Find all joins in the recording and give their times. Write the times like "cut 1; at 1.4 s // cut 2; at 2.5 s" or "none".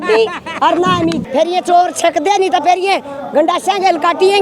cut 1; at 1.2 s